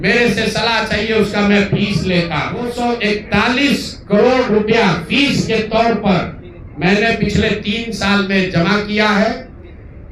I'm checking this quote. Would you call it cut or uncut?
cut